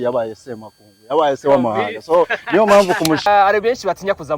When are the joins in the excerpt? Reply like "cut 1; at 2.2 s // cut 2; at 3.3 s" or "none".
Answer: cut 1; at 3.2 s

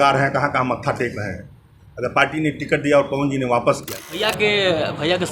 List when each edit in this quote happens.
cut 1; at 4.2 s

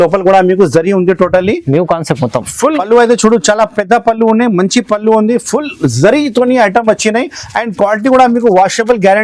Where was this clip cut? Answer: cut 1; at 2.8 s

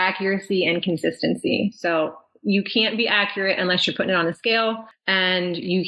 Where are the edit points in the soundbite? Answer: cut 1; at 4.9 s

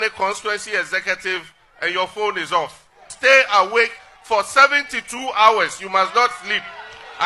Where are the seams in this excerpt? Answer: none

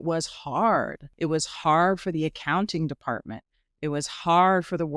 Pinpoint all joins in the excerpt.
cut 1; at 1.0 s

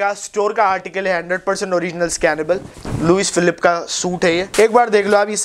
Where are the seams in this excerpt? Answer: cut 1; at 2.8 s // cut 2; at 4.5 s

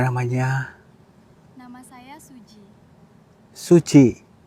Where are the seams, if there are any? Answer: none

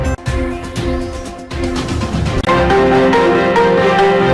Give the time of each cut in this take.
cut 1; at 2.3 s

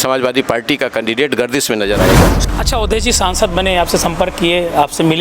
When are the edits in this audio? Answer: cut 1; at 2.4 s

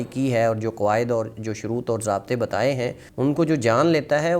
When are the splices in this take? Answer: cut 1; at 3.0 s

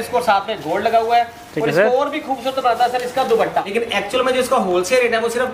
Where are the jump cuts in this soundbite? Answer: cut 1; at 3.7 s

